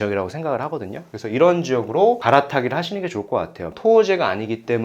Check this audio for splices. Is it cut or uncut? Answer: cut